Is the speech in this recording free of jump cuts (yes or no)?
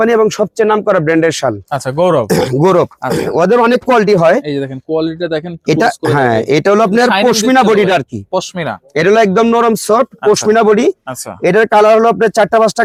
yes